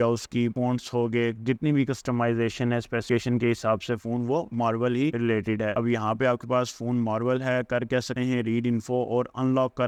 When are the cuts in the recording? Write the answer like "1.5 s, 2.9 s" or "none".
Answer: none